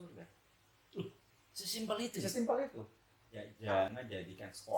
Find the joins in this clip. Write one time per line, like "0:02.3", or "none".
0:03.5

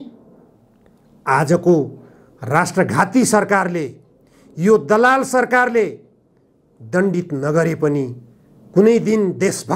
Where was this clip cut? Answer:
none

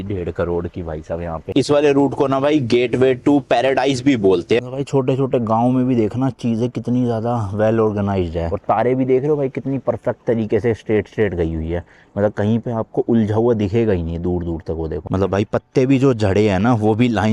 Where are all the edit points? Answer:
0:01.5
0:04.6
0:08.5
0:15.0

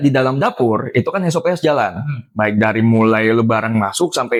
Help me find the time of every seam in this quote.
none

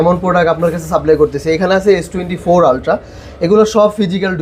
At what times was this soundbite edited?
none

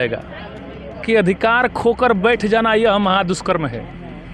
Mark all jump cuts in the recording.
0:01.0

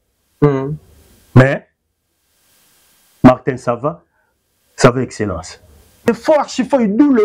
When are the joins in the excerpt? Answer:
0:06.1

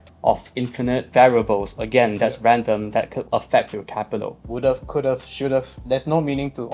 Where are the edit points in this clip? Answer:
0:01.1
0:03.2
0:04.4
0:05.8

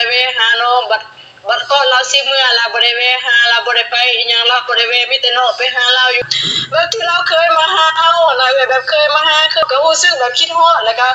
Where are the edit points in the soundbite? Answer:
0:06.2
0:09.6

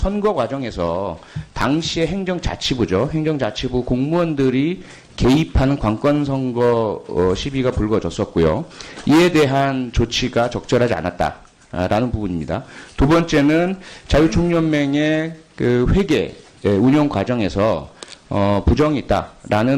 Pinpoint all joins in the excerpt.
0:18.7

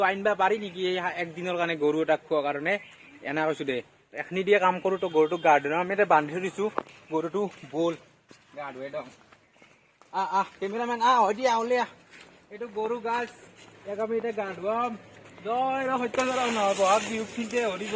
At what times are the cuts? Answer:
none

